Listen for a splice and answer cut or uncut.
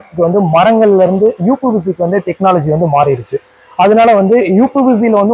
uncut